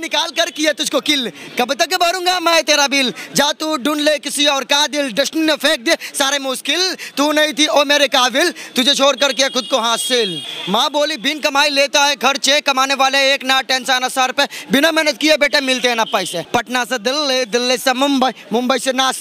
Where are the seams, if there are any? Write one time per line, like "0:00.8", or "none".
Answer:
0:10.5
0:16.4

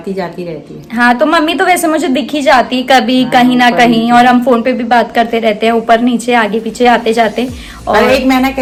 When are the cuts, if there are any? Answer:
none

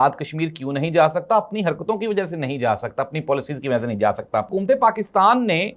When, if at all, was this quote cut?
0:04.5

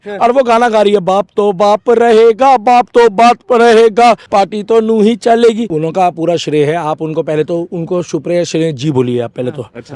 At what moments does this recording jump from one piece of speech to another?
0:04.2
0:05.7

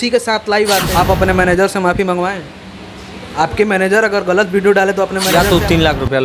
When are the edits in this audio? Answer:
0:00.9
0:05.3

